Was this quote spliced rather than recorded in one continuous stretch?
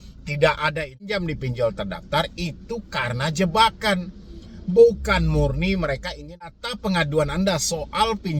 yes; 2 cuts; at 1.2 s, 6.5 s

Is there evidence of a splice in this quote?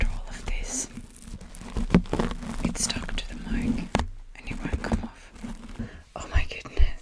yes; 1 cut; at 5.8 s

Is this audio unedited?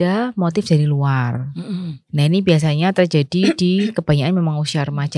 yes; 0 cuts

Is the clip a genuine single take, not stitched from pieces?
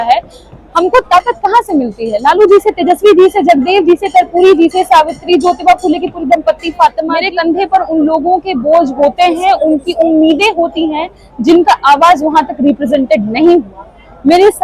no; 1 cut; at 7.1 s

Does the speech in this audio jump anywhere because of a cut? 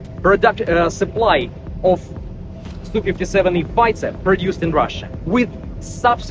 no; 0 cuts

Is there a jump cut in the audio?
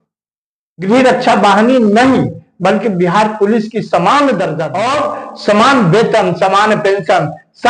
yes; 1 cut; at 4.6 s

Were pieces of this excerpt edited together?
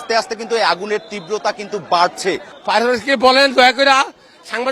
yes; 1 cut; at 2.5 s

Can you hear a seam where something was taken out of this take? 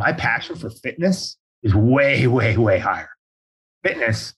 yes; 1 cut; at 3.3 s

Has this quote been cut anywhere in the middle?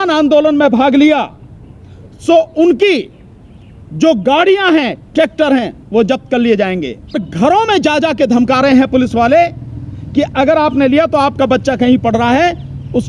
yes; 1 cut; at 7.3 s

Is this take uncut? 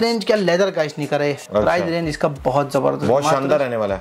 yes; 0 cuts

